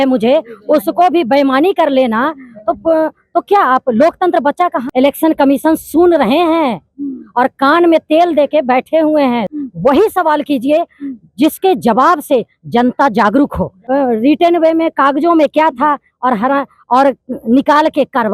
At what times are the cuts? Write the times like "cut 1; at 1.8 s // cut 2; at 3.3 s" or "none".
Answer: cut 1; at 4.8 s // cut 2; at 9.5 s // cut 3; at 13.8 s